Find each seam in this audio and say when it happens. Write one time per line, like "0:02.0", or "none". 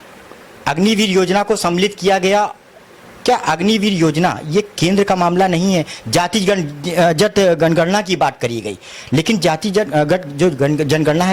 none